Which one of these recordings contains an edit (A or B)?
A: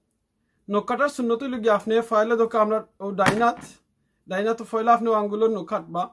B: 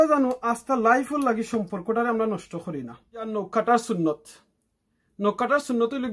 B